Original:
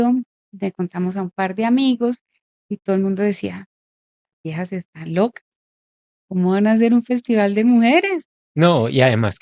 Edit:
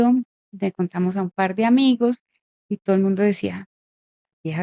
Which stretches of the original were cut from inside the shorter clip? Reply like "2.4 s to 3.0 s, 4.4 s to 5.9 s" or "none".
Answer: none